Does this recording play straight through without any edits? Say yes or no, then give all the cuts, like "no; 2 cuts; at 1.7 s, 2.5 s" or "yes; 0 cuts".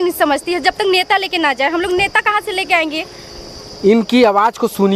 yes; 0 cuts